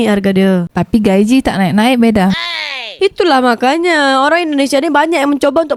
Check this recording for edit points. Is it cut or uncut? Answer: uncut